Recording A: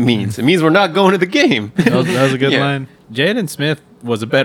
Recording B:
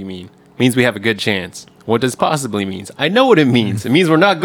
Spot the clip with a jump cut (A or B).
A